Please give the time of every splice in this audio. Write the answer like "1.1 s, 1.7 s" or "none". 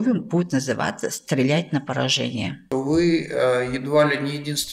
2.6 s